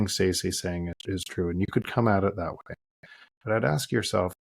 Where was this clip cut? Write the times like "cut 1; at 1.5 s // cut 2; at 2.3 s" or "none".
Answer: cut 1; at 0.9 s